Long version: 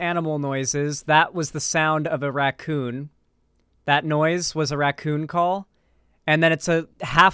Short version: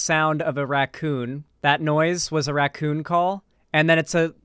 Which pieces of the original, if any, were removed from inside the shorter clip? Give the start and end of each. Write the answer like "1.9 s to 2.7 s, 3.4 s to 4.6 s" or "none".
3.1 s to 3.7 s, 5.8 s to 6.1 s